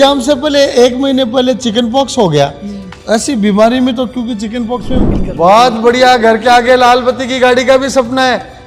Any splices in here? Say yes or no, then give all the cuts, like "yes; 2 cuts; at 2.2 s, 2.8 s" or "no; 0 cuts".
yes; 1 cut; at 5.1 s